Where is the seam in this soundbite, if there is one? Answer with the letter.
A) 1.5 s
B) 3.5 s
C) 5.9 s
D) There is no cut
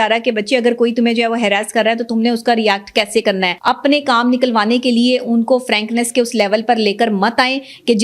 B